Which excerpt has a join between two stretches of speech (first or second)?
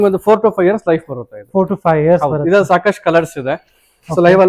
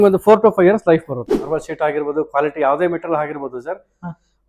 second